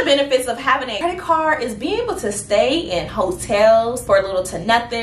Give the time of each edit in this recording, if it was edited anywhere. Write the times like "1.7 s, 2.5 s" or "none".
0.9 s